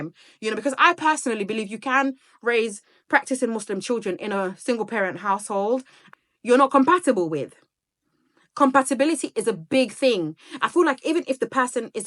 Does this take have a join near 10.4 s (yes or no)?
no